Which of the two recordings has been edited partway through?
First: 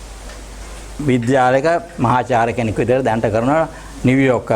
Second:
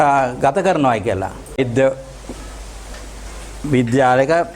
second; 1 cut; at 1.6 s

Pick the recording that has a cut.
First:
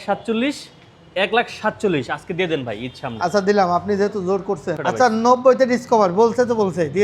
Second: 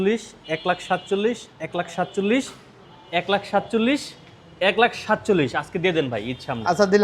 first; 1 cut; at 4.8 s

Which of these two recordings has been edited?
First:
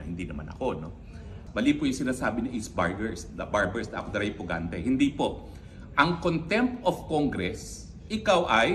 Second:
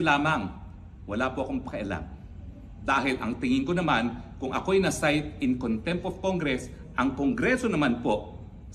first; 1 cut; at 1.3 s

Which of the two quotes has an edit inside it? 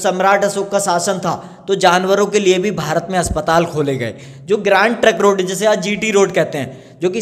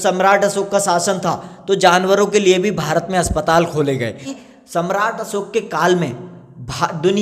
second; 1 cut; at 4.3 s

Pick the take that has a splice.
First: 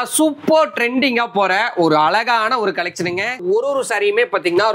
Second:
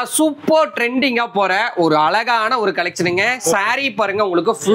first; 1 cut; at 3.4 s

